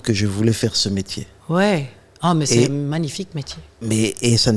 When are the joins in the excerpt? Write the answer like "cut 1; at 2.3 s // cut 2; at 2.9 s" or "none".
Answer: none